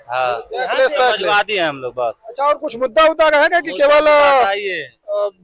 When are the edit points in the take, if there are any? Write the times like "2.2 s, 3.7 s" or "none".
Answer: none